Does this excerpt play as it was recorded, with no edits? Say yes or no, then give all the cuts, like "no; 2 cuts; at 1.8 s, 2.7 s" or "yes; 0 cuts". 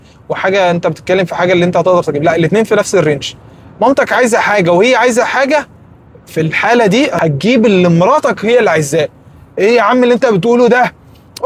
no; 1 cut; at 7.1 s